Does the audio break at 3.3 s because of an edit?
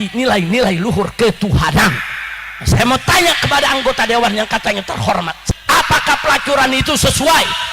no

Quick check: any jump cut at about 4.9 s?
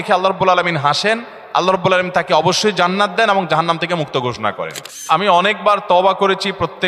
yes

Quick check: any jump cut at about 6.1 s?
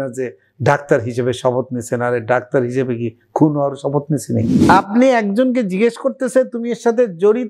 no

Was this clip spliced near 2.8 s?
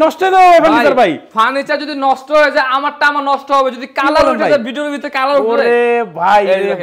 no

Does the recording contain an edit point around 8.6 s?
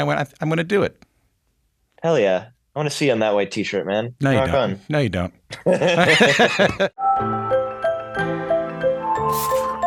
no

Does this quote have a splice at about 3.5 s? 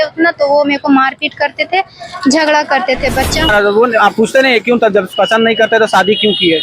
yes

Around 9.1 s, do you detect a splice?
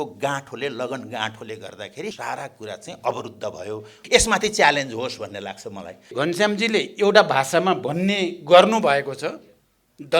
no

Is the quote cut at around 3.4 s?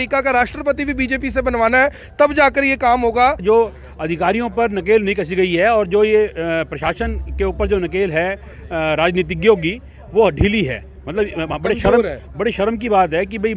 yes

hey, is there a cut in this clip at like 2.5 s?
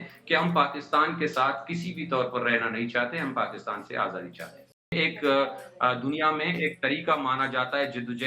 no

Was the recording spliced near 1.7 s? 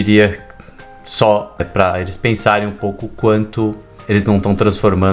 yes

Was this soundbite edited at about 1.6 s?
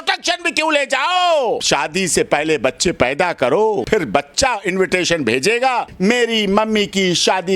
yes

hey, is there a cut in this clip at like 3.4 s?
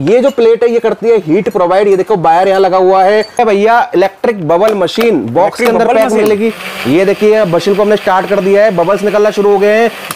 yes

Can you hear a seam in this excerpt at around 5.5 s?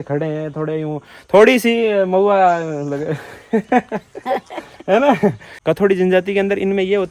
yes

